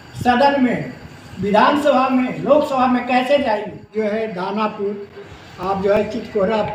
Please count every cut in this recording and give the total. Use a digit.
1